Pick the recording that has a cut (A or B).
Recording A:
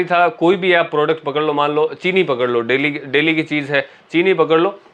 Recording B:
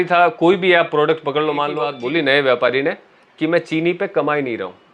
B